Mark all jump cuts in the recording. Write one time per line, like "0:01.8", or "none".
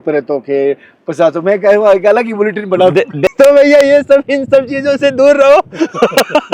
0:03.2